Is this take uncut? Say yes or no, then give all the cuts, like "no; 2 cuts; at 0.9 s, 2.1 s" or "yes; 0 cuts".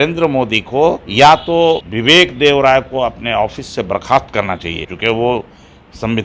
no; 3 cuts; at 1.1 s, 1.9 s, 4.9 s